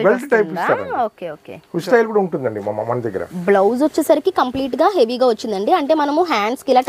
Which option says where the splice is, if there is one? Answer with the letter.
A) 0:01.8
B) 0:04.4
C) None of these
A